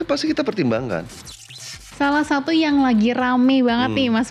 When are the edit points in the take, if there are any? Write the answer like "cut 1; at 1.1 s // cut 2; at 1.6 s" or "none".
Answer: cut 1; at 1.8 s